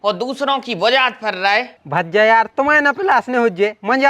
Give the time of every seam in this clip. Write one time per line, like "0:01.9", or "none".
0:01.7